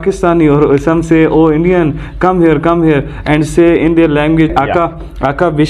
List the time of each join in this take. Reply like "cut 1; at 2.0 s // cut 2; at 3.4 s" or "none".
cut 1; at 4.5 s